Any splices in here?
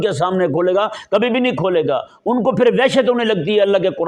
no; 0 cuts

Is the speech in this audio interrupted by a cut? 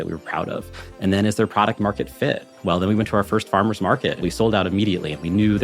yes; 1 cut; at 4.2 s

